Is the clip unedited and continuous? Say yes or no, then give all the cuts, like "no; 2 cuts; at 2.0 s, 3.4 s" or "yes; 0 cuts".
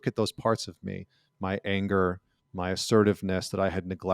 yes; 0 cuts